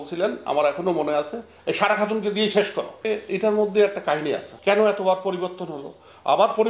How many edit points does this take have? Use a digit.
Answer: 2